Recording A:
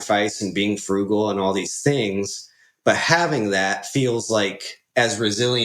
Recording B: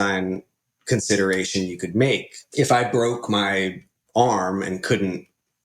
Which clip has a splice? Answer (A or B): B